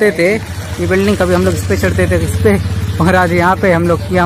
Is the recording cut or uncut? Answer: cut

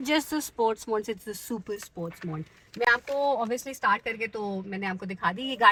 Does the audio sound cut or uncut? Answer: uncut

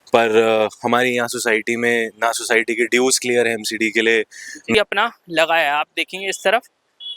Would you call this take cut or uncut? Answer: cut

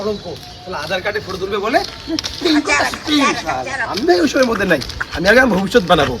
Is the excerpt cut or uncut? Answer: uncut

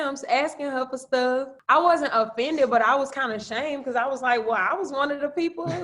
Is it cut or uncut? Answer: cut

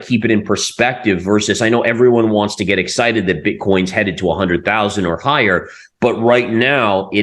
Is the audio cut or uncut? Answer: uncut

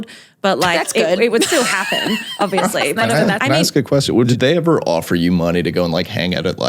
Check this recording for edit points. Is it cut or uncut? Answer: cut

